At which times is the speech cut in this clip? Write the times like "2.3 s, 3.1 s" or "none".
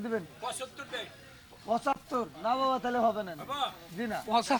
none